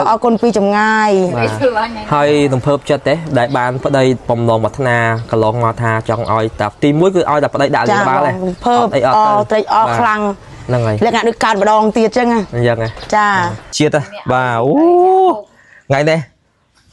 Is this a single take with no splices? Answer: no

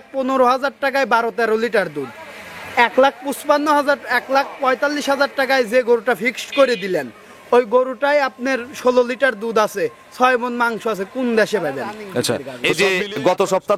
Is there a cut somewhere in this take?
yes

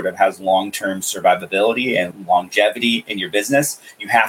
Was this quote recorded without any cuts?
no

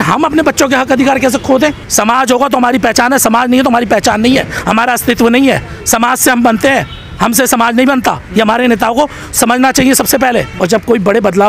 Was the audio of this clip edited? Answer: yes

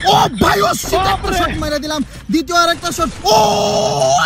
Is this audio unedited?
yes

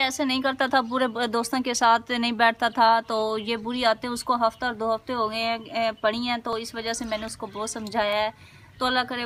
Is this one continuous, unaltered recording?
yes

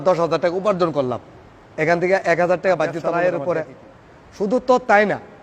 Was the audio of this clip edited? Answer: yes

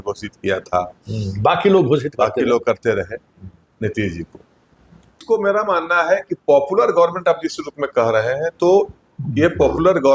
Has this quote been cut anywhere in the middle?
yes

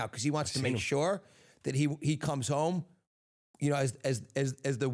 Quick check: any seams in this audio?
no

